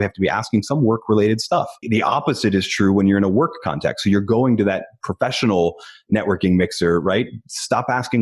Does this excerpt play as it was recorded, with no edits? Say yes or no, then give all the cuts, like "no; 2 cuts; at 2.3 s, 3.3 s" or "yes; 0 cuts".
no; 1 cut; at 1.8 s